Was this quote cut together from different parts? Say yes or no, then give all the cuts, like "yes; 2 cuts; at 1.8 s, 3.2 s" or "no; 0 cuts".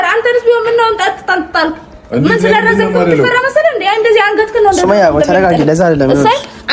no; 0 cuts